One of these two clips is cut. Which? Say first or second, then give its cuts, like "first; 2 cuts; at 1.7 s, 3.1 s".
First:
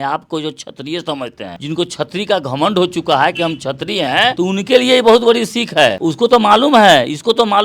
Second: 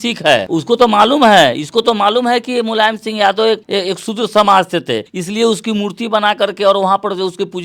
first; 2 cuts; at 1.6 s, 4.3 s